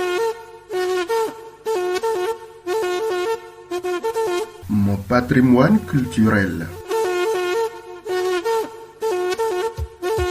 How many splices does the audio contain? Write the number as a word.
one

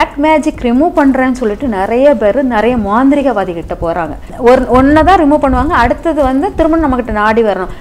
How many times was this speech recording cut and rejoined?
one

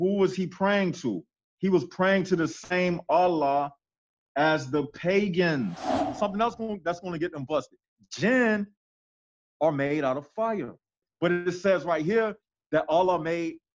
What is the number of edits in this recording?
two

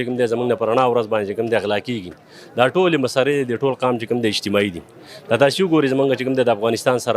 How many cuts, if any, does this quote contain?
zero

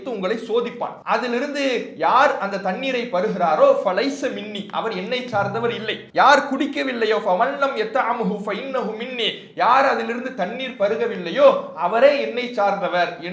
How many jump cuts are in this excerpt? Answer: two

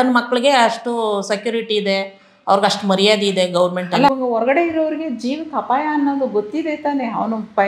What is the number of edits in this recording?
one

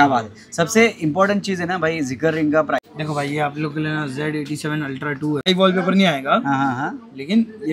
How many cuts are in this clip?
two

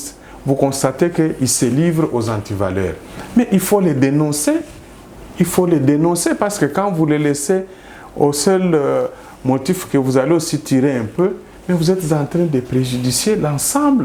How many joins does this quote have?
zero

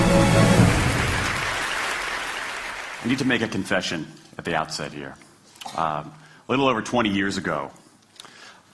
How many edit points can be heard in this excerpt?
zero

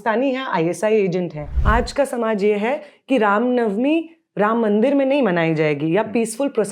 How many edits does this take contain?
one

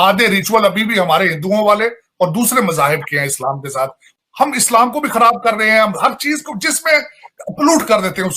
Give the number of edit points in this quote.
one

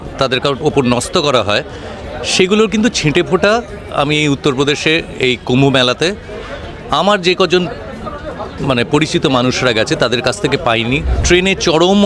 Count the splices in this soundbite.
one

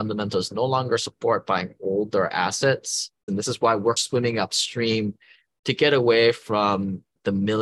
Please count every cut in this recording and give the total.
one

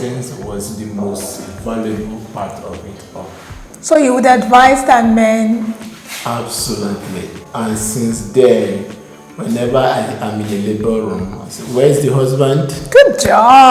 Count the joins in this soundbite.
zero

